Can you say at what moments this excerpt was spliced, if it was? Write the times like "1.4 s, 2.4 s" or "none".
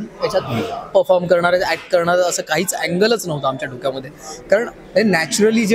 none